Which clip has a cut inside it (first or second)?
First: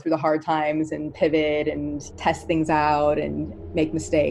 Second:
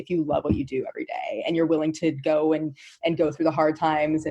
first